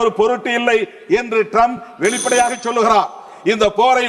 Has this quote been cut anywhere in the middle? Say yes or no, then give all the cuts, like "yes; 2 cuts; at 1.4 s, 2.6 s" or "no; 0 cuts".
no; 0 cuts